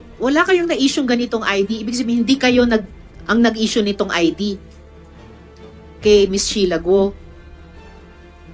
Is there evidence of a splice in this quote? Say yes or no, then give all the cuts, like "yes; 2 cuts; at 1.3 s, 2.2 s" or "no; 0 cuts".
no; 0 cuts